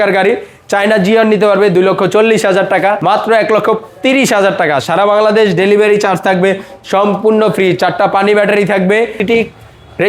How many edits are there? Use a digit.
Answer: 2